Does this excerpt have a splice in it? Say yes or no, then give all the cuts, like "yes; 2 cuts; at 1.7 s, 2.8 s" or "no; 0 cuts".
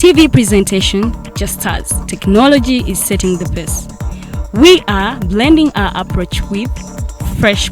no; 0 cuts